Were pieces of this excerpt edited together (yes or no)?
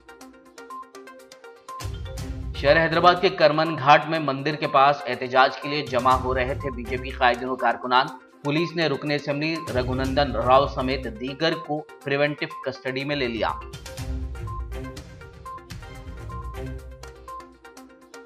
no